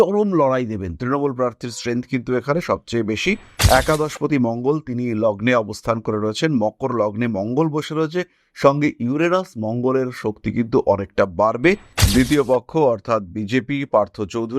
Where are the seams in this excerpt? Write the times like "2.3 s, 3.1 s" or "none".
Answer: 11.9 s